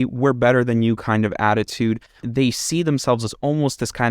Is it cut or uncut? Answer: cut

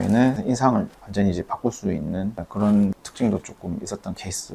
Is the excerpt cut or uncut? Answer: uncut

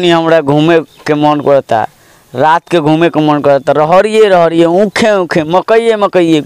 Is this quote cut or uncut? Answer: uncut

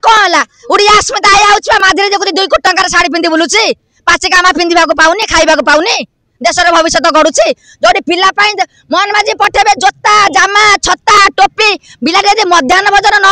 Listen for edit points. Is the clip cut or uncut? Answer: uncut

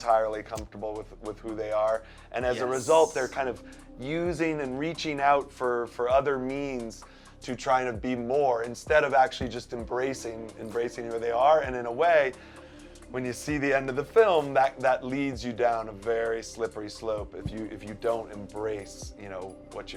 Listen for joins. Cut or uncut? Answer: uncut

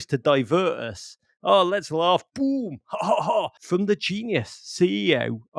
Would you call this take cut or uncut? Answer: cut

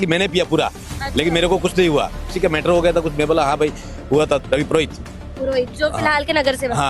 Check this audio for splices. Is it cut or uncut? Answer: cut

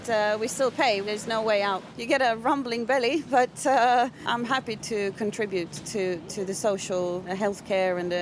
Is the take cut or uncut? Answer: cut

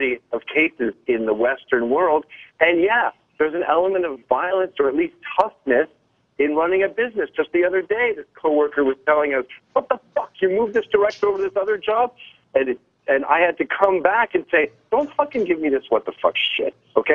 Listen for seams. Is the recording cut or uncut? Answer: cut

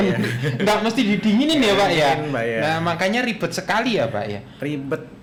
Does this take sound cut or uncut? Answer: uncut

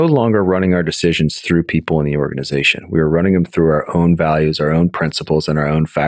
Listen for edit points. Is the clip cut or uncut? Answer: uncut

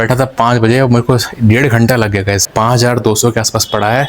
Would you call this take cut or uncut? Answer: cut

